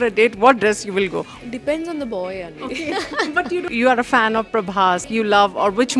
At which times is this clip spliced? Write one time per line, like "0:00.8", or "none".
0:01.3
0:03.7
0:05.0